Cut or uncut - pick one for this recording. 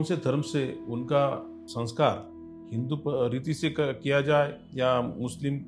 cut